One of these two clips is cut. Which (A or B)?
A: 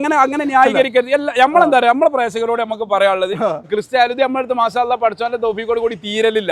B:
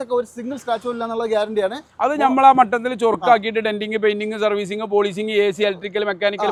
A